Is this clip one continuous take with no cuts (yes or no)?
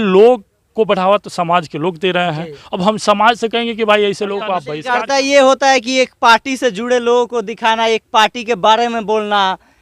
no